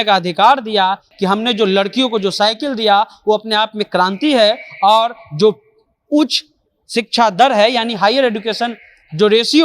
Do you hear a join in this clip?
yes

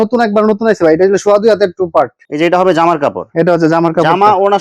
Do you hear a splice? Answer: yes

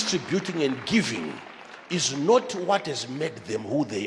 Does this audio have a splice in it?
no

